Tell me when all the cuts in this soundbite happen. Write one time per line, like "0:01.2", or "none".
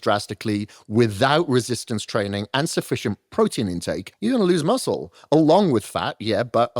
0:04.1